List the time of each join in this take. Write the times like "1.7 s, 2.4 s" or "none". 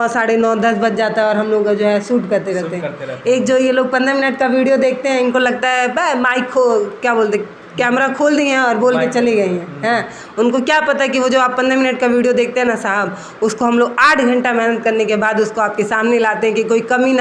none

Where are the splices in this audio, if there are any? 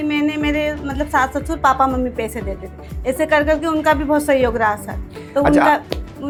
none

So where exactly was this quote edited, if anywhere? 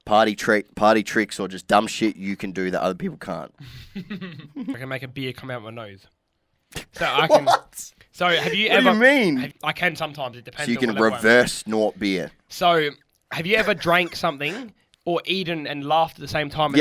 4.8 s, 9.5 s

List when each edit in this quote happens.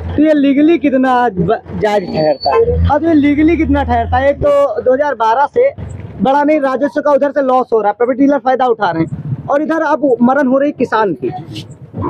none

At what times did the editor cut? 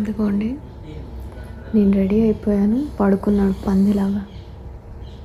none

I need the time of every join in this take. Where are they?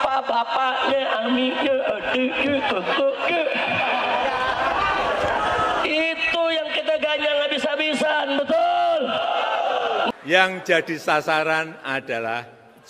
10.1 s

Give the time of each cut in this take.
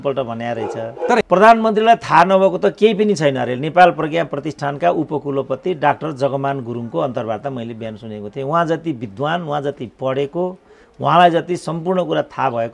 1.2 s

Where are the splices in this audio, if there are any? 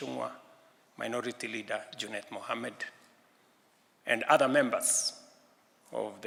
none

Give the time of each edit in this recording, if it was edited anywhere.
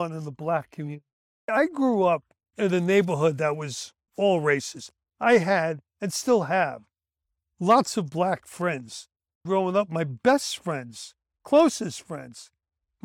1.3 s, 9.4 s

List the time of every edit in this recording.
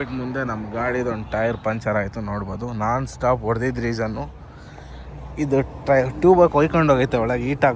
none

